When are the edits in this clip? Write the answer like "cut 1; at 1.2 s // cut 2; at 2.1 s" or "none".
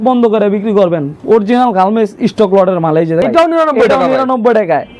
cut 1; at 3.3 s